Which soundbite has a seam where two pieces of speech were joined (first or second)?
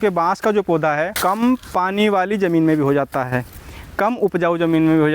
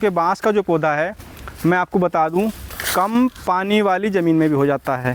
first